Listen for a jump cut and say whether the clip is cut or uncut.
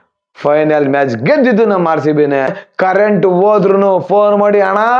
cut